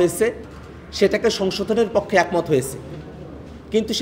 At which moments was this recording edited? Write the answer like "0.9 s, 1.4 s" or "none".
none